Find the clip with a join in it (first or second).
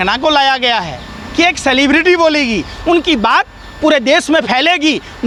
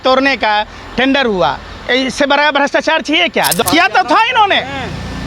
second